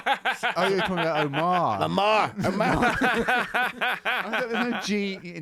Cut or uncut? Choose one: uncut